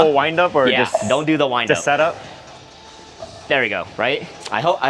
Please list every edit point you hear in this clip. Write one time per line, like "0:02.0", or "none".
none